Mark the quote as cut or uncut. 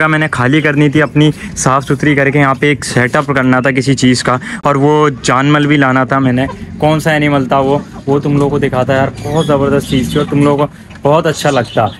uncut